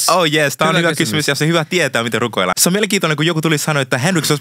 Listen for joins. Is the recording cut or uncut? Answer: cut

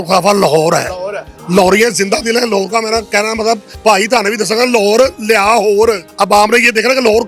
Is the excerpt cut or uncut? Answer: cut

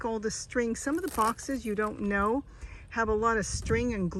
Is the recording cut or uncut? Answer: uncut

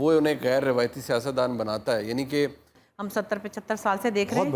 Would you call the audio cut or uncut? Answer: cut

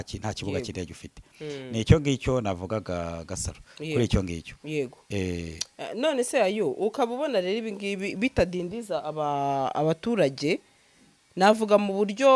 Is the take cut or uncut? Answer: uncut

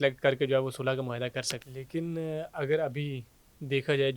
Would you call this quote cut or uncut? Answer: cut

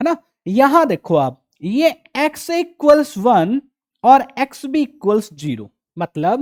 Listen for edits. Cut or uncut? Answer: uncut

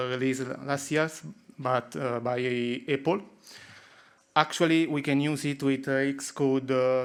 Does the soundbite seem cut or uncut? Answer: uncut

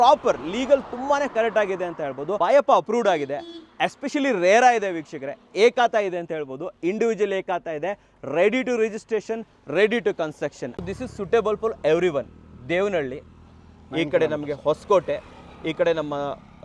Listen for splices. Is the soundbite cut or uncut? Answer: cut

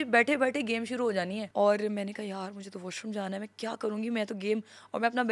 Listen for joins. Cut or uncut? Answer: cut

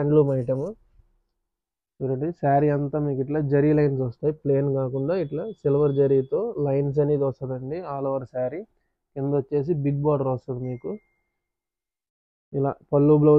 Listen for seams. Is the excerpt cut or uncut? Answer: uncut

